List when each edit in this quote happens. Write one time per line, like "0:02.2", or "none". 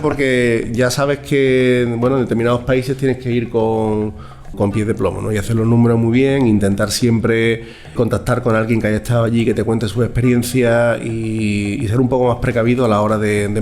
0:04.6
0:08.0